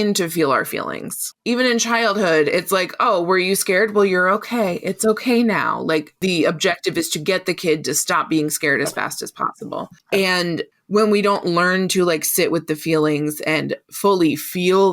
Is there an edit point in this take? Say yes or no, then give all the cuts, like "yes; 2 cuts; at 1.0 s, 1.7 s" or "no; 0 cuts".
yes; 1 cut; at 6.1 s